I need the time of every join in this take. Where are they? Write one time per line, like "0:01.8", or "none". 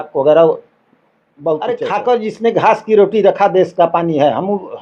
0:01.8